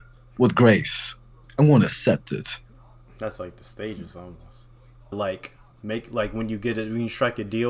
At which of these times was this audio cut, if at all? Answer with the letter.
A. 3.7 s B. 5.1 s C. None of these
B